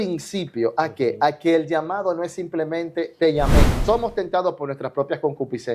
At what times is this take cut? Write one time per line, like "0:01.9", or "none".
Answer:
0:03.8